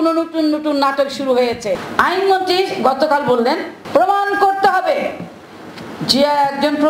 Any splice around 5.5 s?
no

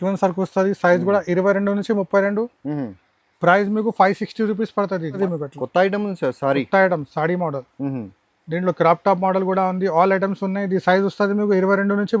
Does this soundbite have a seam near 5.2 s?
yes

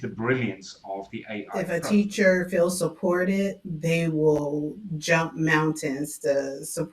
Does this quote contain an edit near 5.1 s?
no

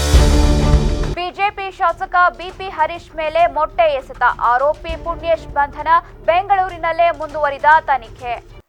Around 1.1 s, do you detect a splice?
no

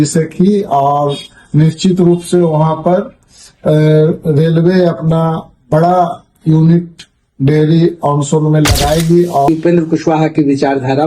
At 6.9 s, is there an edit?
no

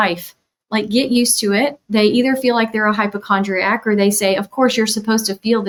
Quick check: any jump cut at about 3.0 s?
no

